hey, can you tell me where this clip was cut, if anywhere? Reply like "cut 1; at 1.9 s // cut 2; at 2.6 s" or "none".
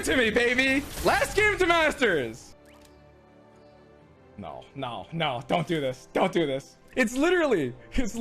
cut 1; at 2.5 s // cut 2; at 6.8 s